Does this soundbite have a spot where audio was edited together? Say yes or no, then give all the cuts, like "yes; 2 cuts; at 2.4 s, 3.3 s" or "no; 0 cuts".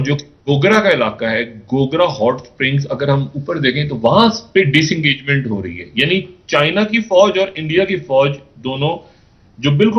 no; 0 cuts